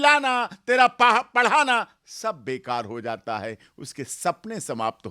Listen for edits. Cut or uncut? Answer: uncut